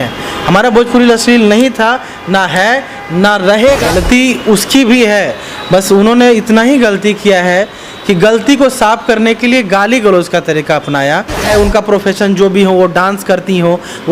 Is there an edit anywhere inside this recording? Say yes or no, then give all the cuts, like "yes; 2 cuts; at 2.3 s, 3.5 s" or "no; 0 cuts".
yes; 2 cuts; at 3.8 s, 11.4 s